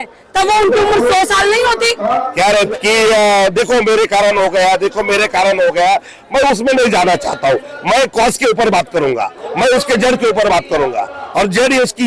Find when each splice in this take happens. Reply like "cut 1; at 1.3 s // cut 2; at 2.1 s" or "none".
cut 1; at 2.7 s